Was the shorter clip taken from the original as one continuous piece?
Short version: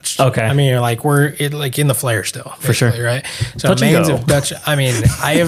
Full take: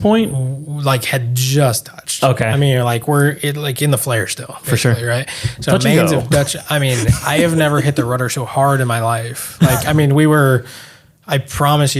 yes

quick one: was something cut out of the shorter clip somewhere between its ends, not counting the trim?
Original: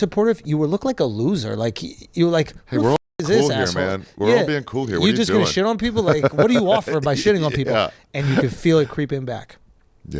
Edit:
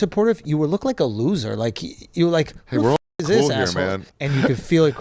yes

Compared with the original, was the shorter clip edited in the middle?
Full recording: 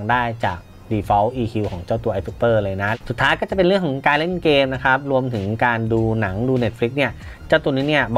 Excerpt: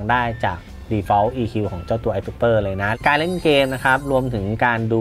yes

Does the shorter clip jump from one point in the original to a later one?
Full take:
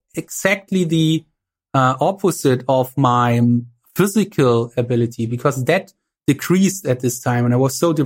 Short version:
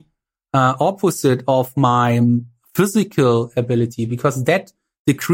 no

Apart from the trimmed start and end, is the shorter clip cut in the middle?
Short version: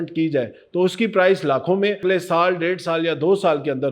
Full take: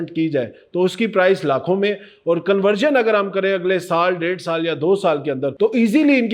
yes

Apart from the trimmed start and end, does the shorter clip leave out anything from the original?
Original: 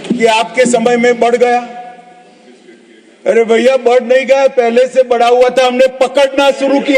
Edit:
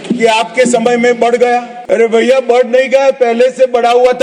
yes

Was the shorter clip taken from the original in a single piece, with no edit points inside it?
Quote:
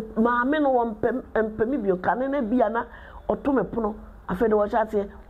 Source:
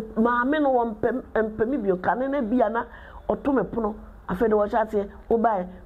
yes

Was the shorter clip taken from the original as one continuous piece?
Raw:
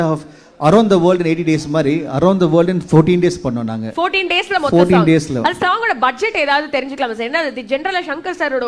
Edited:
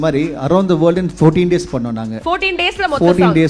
yes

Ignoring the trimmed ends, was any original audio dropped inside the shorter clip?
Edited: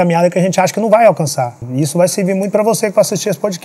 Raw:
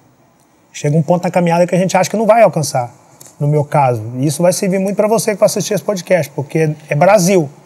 yes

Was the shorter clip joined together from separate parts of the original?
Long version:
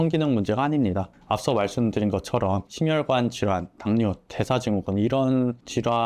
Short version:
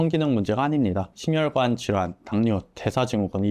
yes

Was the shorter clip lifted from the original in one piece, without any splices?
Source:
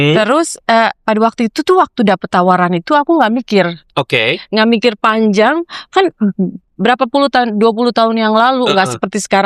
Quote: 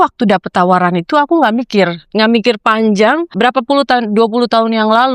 no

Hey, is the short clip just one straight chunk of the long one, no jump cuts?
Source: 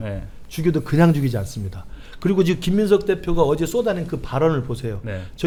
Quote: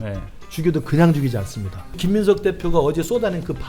no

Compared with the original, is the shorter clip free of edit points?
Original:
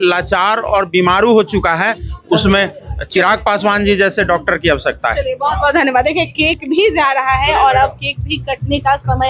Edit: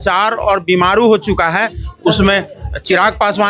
yes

